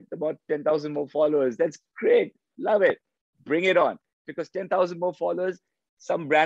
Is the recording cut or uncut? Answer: uncut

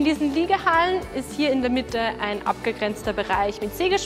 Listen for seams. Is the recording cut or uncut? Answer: uncut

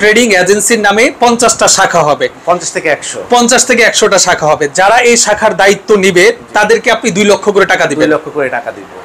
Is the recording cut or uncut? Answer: uncut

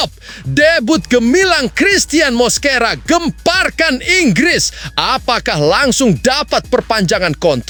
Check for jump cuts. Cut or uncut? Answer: uncut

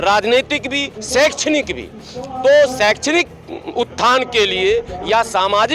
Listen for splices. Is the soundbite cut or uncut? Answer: uncut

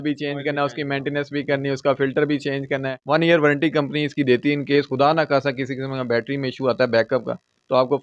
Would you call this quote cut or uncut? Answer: cut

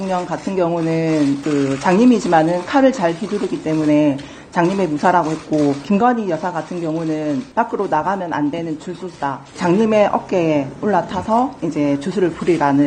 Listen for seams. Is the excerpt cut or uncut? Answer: cut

